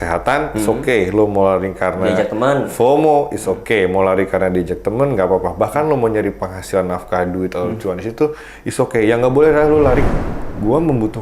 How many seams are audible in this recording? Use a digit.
1